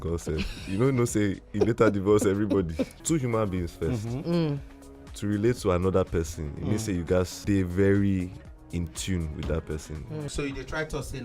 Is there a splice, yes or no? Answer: yes